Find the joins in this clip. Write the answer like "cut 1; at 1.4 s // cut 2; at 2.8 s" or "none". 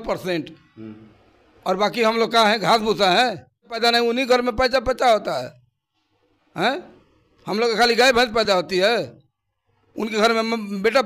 cut 1; at 3.7 s